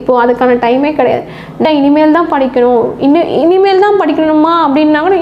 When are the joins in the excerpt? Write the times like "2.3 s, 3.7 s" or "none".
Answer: 1.6 s